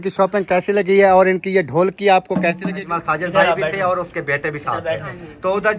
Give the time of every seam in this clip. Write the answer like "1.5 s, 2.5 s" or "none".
2.9 s